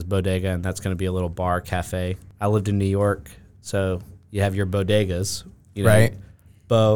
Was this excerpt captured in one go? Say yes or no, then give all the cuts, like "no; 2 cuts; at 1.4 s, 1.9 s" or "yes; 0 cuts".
no; 1 cut; at 2.2 s